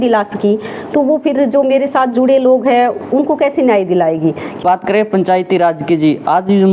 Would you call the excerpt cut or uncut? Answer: cut